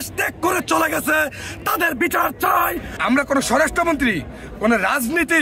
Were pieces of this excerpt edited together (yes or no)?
yes